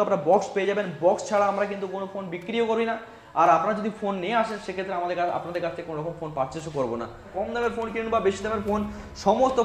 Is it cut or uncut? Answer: cut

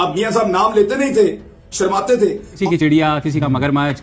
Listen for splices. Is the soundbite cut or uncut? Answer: cut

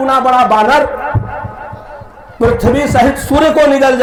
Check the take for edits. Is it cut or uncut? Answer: uncut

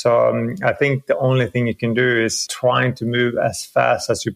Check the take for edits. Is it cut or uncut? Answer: cut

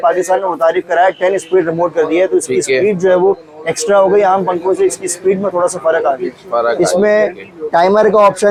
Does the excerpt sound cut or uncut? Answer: uncut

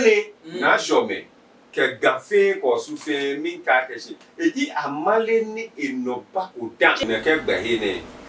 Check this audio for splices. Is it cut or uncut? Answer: cut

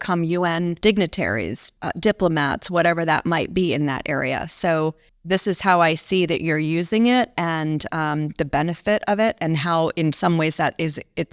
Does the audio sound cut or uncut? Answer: cut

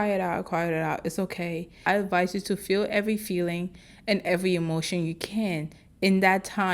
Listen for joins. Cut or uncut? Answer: cut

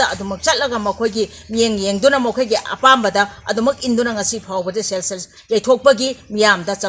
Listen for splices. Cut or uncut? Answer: uncut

